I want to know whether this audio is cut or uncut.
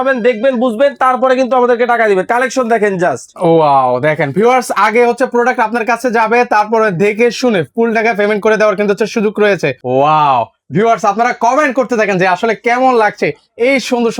cut